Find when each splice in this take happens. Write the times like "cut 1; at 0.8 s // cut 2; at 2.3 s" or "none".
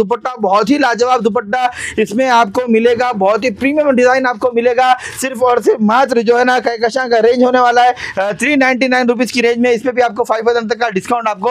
none